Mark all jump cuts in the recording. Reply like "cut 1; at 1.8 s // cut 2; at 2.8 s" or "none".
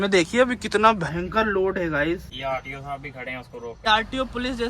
cut 1; at 2.3 s // cut 2; at 3.9 s